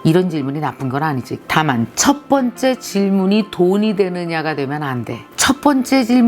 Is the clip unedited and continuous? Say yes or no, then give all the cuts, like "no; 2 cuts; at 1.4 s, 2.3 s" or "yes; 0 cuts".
no; 2 cuts; at 1.4 s, 5.3 s